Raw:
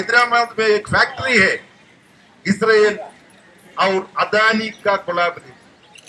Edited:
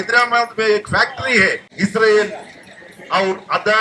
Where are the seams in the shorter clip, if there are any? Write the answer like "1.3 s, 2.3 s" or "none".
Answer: 1.7 s